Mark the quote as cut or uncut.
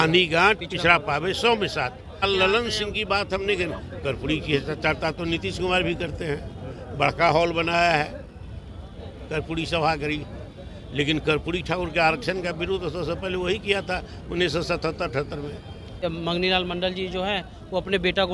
cut